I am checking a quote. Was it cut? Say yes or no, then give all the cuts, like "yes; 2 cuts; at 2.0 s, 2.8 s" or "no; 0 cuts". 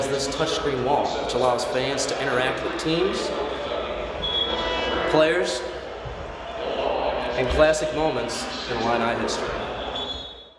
no; 0 cuts